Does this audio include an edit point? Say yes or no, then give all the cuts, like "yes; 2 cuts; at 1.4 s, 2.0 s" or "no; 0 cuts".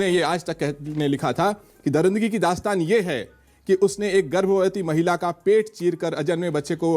no; 0 cuts